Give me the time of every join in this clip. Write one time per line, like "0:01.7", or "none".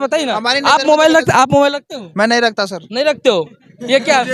none